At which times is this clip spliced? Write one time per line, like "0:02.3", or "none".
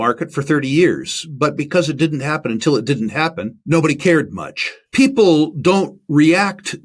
0:03.5
0:04.8